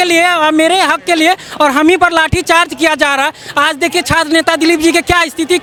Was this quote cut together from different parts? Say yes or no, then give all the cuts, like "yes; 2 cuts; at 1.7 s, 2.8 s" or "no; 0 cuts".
no; 0 cuts